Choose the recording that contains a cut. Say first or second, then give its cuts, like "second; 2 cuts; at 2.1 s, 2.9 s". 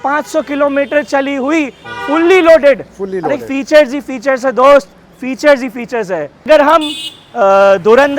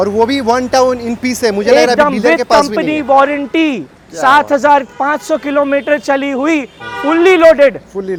first; 1 cut; at 6.5 s